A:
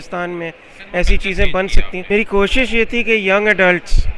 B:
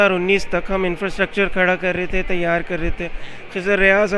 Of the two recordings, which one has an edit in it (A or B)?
A